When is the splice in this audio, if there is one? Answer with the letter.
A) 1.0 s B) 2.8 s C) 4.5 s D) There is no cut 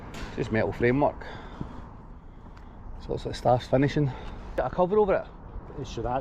C